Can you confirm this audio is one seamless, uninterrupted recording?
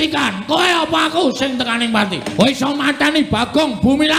no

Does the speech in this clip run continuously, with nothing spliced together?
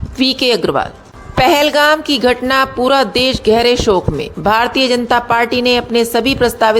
no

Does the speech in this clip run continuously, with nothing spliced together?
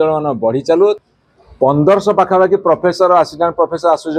no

